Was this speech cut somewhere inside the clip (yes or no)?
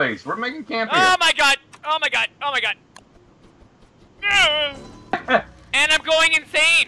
yes